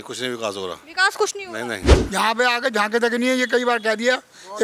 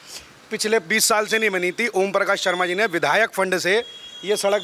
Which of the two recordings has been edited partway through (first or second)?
first